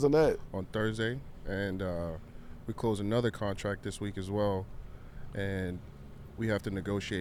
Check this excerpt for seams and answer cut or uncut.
uncut